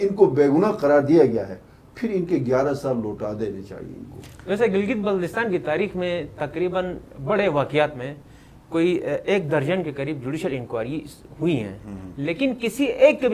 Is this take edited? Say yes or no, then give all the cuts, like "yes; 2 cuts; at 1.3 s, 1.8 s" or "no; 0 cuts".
no; 0 cuts